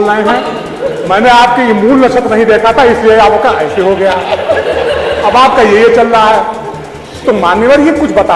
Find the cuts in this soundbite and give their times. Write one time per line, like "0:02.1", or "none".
none